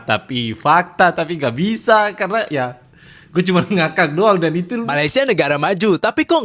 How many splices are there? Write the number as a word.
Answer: one